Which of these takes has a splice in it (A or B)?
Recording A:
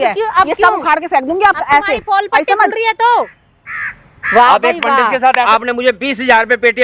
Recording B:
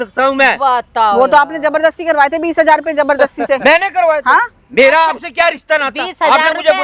A